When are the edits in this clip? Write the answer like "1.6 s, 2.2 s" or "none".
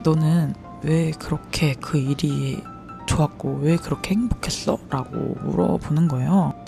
none